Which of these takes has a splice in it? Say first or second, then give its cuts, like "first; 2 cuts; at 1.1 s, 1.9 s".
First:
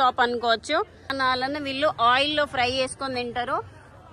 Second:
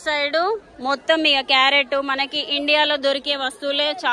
first; 1 cut; at 1.1 s